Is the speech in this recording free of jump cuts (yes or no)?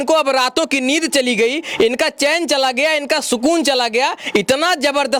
yes